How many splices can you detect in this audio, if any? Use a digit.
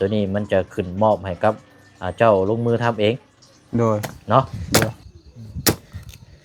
1